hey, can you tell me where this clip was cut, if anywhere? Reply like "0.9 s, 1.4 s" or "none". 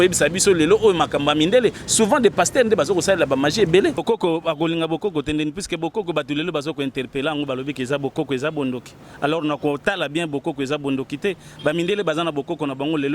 4.0 s